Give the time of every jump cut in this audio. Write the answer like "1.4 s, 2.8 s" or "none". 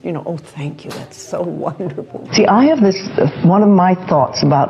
2.3 s